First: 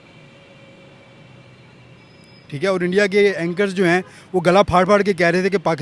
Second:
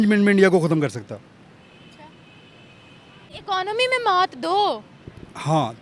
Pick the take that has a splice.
second; 1 cut; at 3.3 s

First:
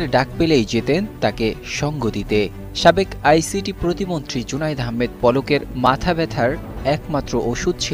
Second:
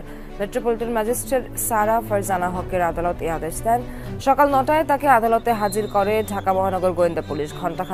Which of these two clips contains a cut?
second; 1 cut; at 4.1 s

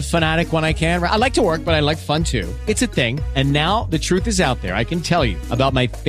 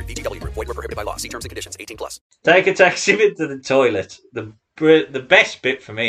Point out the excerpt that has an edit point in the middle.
second; 1 cut; at 2.2 s

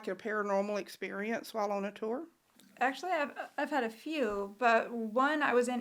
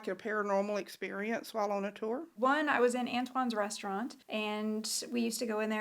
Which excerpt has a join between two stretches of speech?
second; 2 cuts; at 2.3 s, 4.2 s

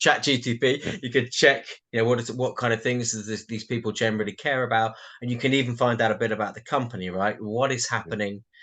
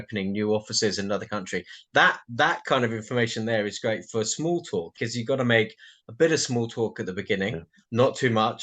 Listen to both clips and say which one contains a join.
second; 1 cut; at 4.9 s

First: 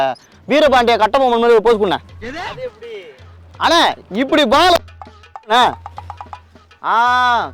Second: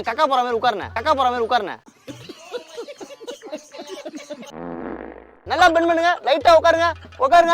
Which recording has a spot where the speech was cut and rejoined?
second; 1 cut; at 5.4 s

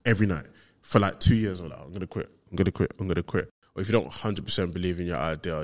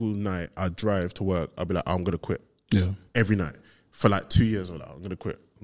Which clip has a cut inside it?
first; 1 cut; at 3.6 s

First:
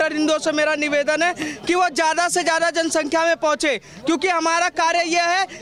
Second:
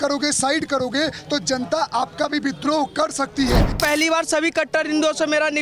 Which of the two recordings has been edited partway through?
second; 1 cut; at 3.8 s

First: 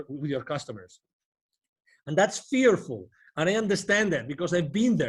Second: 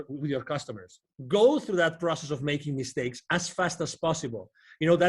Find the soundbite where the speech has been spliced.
second; 1 cut; at 1.1 s

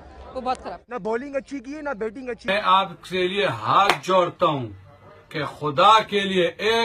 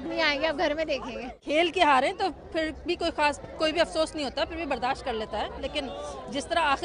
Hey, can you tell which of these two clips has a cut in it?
first; 1 cut; at 2.4 s

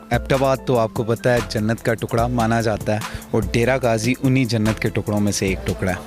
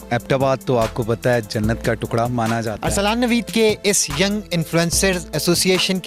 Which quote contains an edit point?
second; 1 cut; at 2.8 s

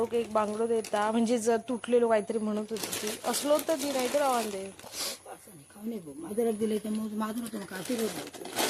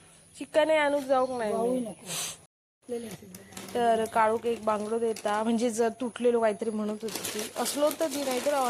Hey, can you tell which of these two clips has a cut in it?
second; 1 cut; at 2.5 s

